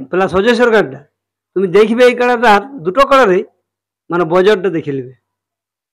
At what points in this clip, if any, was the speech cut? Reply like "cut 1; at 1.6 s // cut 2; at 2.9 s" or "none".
none